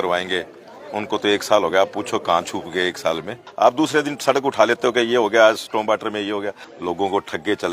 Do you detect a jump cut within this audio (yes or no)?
yes